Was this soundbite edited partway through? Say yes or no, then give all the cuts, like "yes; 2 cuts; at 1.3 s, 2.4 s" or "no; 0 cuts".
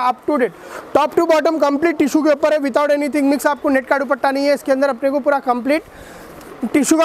no; 0 cuts